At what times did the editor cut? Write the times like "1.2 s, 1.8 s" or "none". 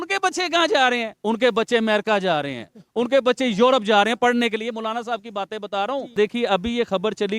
6.1 s

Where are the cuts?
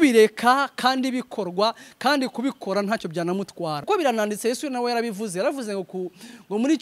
3.8 s

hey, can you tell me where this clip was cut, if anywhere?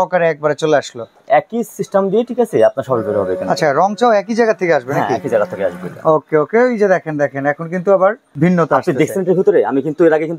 1.1 s, 8.2 s

